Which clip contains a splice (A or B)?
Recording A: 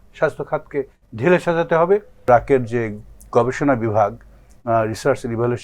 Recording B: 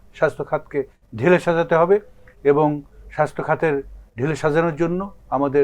A